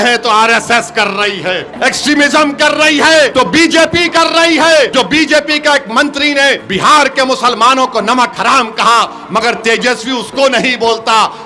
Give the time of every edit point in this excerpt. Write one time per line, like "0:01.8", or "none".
0:01.7
0:03.3
0:04.9
0:06.6